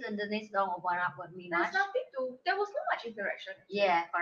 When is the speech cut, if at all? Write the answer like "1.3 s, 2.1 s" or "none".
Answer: none